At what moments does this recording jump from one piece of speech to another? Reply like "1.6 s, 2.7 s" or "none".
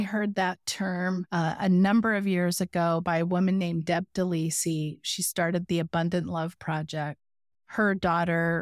none